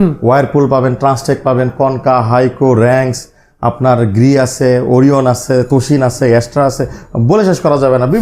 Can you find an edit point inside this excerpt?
no; 0 cuts

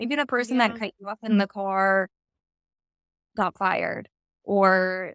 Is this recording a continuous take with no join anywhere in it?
yes; 0 cuts

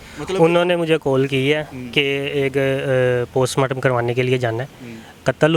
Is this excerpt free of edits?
yes; 0 cuts

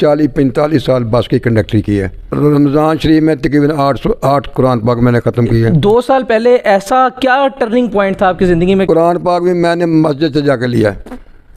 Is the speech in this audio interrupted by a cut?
yes; 3 cuts; at 2.2 s, 5.7 s, 8.8 s

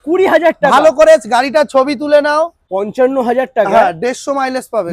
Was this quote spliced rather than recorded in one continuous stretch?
yes; 1 cut; at 2.6 s

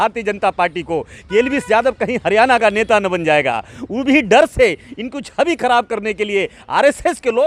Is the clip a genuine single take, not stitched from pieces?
yes; 0 cuts

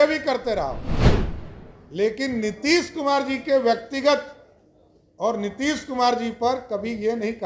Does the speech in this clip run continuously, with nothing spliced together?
yes; 0 cuts

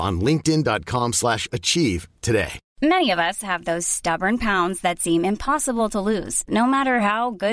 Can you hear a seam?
yes; 1 cut; at 2.6 s

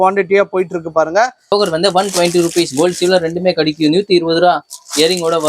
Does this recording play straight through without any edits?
no; 1 cut; at 1.5 s

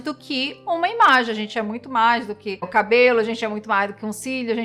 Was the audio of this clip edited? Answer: no; 0 cuts

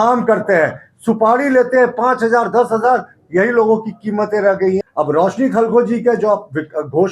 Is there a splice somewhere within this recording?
yes; 1 cut; at 4.8 s

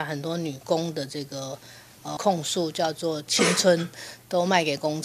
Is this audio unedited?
yes; 0 cuts

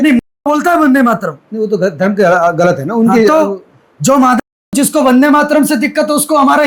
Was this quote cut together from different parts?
no; 0 cuts

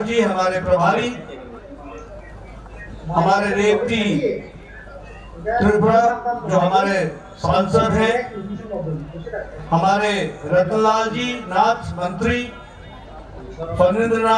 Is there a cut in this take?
yes; 1 cut; at 13.4 s

